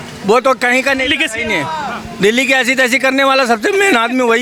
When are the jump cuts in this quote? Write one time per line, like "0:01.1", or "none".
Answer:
none